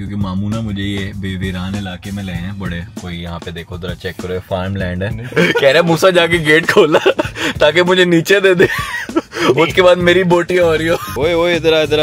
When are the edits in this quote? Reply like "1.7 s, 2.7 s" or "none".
11.1 s